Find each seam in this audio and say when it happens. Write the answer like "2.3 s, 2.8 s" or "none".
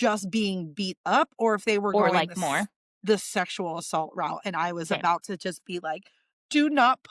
none